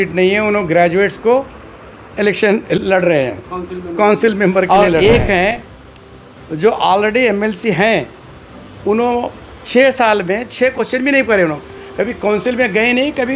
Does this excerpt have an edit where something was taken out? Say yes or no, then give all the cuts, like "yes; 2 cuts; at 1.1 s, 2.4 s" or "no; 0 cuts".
yes; 1 cut; at 4.7 s